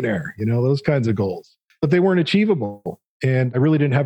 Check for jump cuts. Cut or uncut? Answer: cut